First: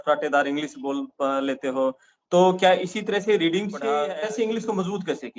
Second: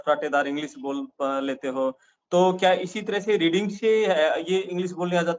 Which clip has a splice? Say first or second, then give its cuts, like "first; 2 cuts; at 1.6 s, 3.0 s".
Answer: first; 1 cut; at 3.9 s